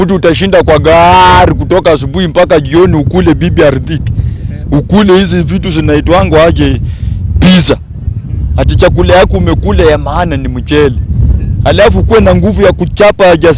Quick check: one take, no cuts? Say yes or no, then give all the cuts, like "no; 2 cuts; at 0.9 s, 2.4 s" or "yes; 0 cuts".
yes; 0 cuts